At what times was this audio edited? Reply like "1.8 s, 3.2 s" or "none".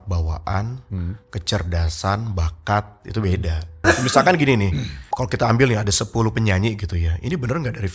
3.7 s